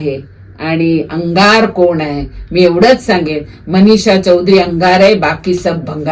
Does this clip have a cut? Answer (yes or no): no